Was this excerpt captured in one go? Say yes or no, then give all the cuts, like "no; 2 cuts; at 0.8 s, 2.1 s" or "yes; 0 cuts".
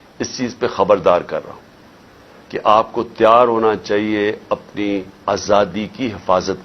yes; 0 cuts